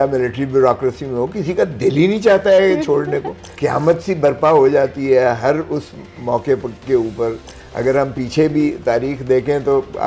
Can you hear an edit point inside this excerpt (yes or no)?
yes